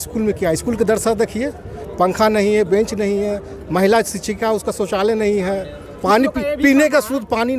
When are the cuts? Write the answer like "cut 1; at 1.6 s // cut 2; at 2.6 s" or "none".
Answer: none